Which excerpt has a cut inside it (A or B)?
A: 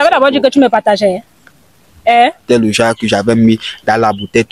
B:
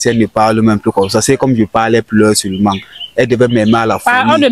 A